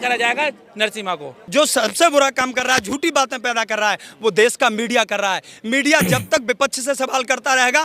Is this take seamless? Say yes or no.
no